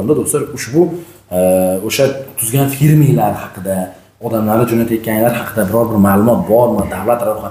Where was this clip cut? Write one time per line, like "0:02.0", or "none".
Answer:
none